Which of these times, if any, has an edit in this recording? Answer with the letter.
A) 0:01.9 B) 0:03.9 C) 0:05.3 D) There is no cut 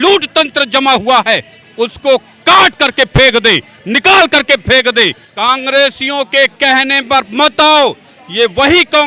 C